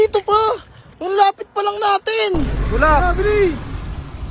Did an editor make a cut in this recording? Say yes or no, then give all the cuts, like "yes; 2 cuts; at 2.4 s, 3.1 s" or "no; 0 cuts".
yes; 1 cut; at 2.6 s